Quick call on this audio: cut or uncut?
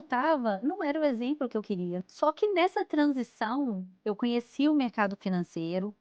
cut